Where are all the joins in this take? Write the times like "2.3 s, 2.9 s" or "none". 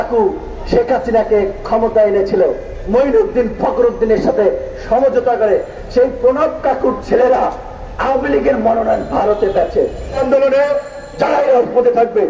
10.2 s